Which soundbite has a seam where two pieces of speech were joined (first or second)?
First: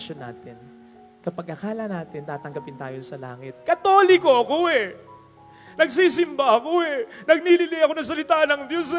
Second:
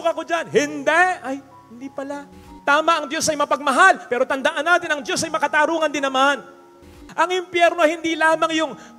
second